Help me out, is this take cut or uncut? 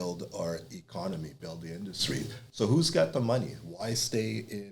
uncut